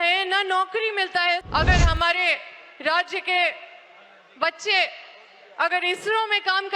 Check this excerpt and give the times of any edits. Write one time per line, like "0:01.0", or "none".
0:01.4